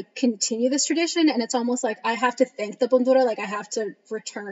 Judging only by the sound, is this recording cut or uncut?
cut